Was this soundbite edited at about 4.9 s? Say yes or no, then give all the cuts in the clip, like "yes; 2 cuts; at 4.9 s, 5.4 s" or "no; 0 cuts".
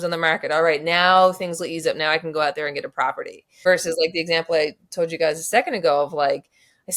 no; 1 cut; at 3.5 s